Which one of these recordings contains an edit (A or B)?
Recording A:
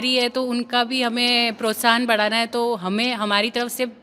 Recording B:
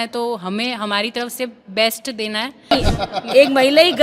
B